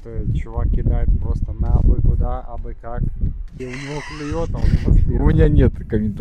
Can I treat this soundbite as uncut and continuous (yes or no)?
yes